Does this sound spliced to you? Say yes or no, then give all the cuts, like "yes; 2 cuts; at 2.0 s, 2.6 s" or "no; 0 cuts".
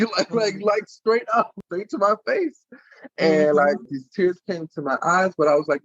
yes; 2 cuts; at 1.5 s, 3.8 s